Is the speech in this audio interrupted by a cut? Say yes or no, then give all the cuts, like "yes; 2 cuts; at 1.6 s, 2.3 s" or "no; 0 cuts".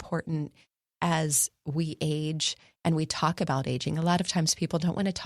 no; 0 cuts